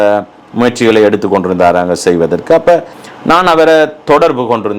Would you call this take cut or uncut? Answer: cut